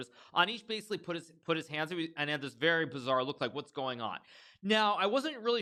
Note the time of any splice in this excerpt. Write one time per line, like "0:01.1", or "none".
none